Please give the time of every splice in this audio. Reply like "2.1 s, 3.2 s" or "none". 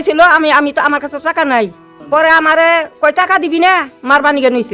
1.9 s